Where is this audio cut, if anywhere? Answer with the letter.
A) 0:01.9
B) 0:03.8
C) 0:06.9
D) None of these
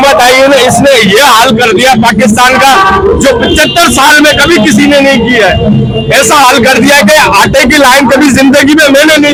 D